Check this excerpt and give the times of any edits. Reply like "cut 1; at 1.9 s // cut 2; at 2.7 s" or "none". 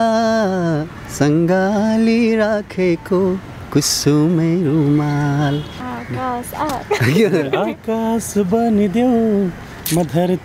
cut 1; at 5.7 s

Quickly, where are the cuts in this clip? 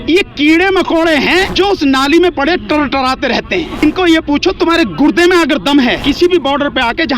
cut 1; at 1.3 s // cut 2; at 3.8 s // cut 3; at 6.0 s

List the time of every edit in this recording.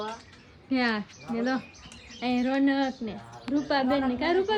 none

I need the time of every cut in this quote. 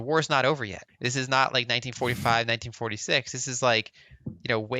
cut 1; at 0.9 s

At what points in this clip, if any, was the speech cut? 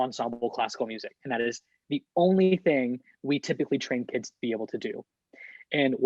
none

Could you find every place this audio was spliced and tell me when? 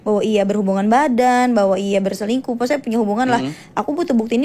none

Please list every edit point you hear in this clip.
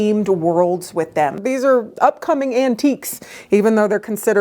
cut 1; at 1.4 s

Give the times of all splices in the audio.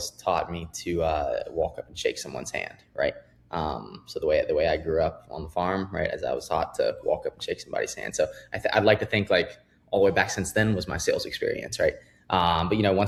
none

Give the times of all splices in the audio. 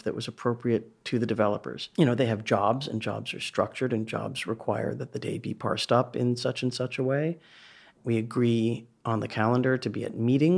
cut 1; at 1.8 s // cut 2; at 7.9 s

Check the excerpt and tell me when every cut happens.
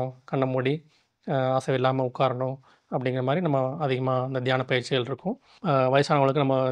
cut 1; at 5.4 s

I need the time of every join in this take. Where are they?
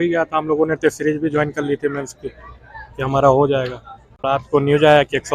cut 1; at 4.2 s

